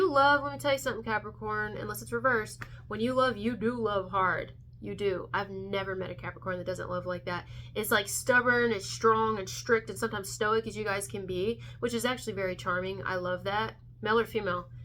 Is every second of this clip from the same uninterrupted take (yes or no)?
yes